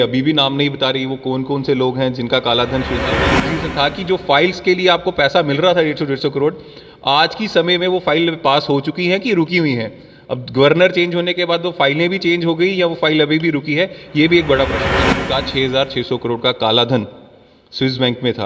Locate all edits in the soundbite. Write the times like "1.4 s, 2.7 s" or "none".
3.2 s, 15.2 s